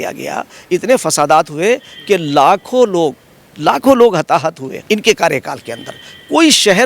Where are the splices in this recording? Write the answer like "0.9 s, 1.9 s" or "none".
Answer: 4.7 s